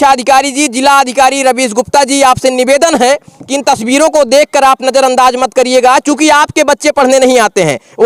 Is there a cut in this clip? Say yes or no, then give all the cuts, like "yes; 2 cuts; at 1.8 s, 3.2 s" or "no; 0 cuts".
no; 0 cuts